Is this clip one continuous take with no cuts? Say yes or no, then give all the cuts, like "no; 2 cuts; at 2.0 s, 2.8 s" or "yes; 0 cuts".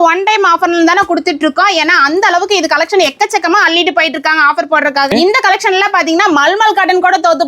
no; 1 cut; at 5.1 s